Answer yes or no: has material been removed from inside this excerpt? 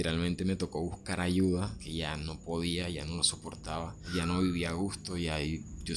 yes